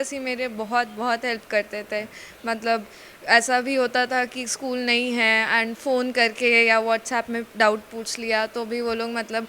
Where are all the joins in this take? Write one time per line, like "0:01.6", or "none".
none